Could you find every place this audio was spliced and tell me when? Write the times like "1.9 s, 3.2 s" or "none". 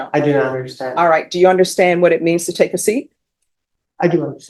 none